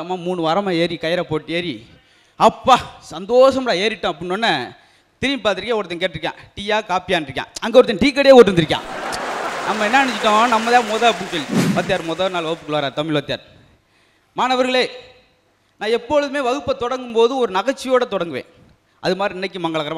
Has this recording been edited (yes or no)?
no